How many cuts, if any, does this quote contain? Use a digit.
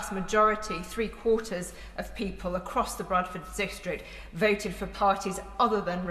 0